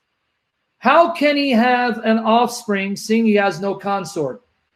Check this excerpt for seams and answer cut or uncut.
uncut